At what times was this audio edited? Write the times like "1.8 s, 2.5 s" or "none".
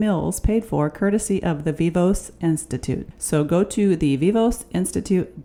none